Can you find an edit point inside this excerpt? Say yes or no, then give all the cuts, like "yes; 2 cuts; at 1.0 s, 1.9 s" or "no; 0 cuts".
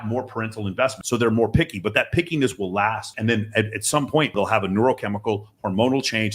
yes; 3 cuts; at 1.0 s, 3.1 s, 4.4 s